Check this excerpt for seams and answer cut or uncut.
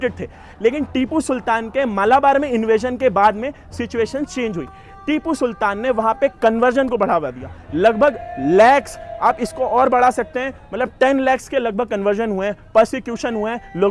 uncut